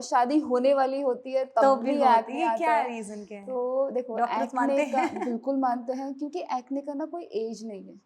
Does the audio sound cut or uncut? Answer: uncut